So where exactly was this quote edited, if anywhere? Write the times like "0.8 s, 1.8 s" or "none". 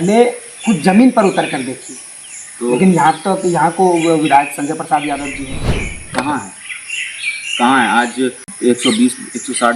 8.5 s